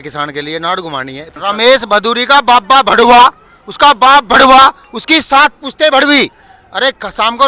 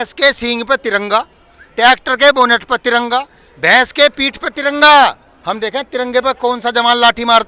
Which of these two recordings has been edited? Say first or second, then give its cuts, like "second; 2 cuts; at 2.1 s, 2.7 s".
first; 2 cuts; at 1.4 s, 6.5 s